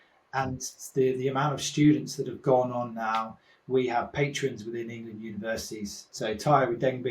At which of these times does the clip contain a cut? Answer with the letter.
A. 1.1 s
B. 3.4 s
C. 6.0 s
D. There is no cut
C